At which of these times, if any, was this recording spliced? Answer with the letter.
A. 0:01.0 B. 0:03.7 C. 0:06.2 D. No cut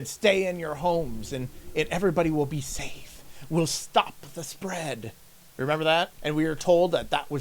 C